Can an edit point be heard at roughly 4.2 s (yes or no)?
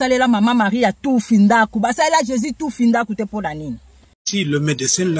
yes